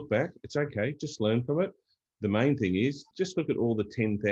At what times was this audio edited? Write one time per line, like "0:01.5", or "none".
0:03.1